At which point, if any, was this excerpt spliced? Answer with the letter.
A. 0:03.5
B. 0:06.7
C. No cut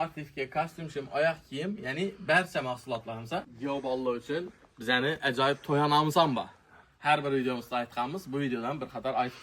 A